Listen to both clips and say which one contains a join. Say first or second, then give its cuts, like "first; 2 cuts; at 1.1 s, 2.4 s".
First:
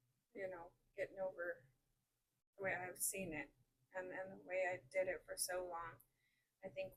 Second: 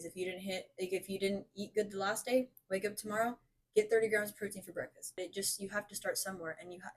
second; 1 cut; at 5.2 s